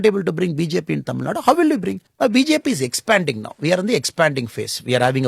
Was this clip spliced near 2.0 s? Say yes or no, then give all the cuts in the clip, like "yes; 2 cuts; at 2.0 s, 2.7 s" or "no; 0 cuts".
yes; 1 cut; at 2.0 s